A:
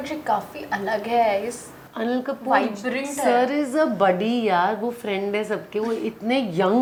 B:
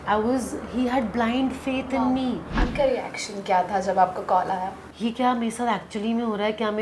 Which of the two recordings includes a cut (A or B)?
B